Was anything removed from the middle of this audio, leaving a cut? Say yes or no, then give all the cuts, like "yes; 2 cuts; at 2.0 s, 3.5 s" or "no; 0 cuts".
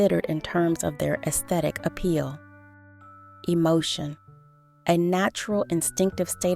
yes; 1 cut; at 2.8 s